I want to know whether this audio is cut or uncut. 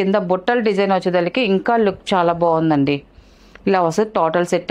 uncut